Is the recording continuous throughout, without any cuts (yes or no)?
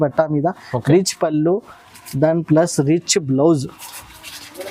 yes